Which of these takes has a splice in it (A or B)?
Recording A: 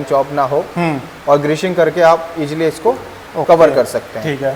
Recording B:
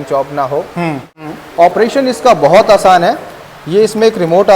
B